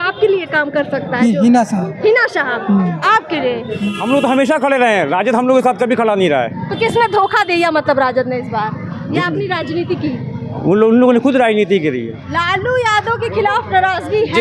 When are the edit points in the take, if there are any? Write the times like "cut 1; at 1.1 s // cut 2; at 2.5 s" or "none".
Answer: cut 1; at 3.8 s // cut 2; at 12.2 s